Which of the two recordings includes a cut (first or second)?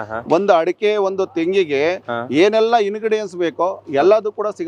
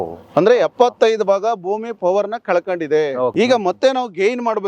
second